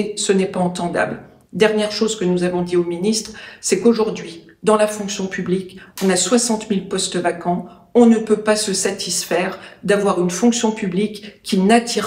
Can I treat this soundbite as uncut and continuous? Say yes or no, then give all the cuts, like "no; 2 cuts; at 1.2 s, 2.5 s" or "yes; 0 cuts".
yes; 0 cuts